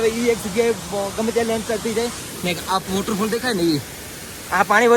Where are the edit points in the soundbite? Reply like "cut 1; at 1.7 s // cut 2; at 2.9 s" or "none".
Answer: none